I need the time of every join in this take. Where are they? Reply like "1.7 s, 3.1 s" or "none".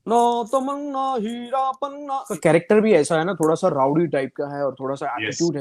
2.3 s